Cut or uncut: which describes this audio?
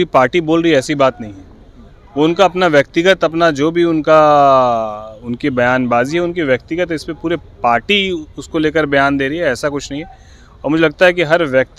uncut